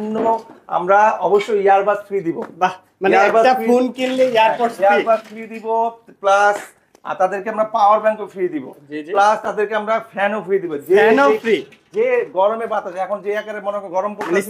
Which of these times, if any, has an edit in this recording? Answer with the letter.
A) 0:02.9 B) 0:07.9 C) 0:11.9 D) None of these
D